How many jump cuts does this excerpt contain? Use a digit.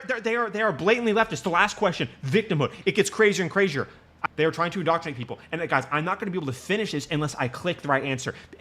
1